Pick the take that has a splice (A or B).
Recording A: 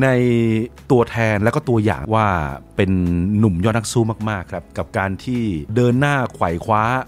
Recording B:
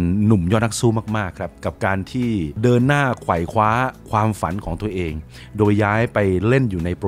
A